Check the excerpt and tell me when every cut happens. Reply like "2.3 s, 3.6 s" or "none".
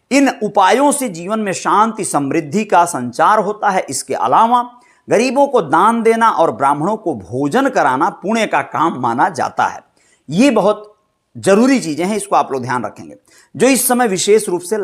none